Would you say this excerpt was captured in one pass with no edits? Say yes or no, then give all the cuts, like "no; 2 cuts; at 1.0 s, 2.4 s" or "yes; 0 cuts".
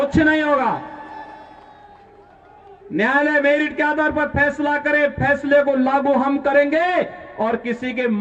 yes; 0 cuts